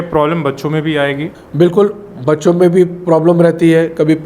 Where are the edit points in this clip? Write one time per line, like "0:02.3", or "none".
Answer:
0:01.4